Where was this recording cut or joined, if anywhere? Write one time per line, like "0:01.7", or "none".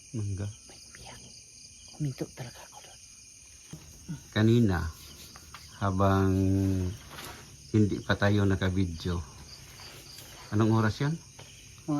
0:03.9